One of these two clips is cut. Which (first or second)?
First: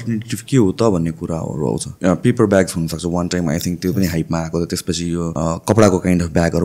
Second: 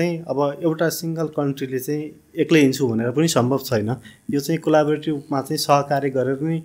first